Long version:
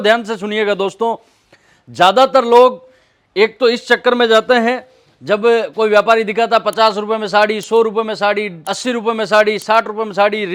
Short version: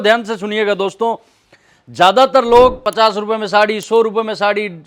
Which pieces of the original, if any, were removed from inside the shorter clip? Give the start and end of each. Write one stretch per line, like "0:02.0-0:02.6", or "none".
0:02.9-0:06.7